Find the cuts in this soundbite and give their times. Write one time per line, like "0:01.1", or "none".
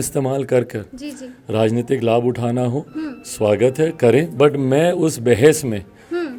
none